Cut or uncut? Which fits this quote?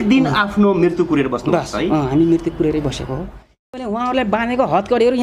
cut